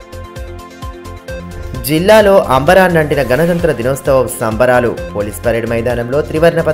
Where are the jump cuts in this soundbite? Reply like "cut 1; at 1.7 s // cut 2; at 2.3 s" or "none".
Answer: cut 1; at 1.4 s